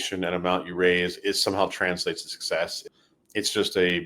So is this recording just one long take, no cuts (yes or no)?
no